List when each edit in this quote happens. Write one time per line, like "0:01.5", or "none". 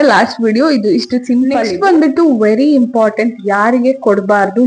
0:01.6

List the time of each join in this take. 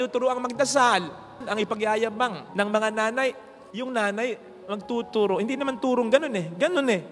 0:01.4
0:03.5

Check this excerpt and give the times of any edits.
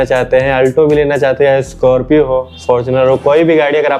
none

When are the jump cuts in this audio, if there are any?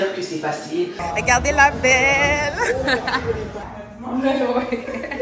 0:01.0
0:03.6

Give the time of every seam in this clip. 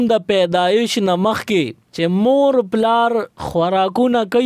0:01.8
0:03.4

